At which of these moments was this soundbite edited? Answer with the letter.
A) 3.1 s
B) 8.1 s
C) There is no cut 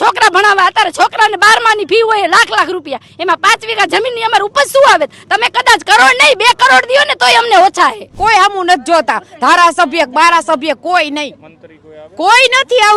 B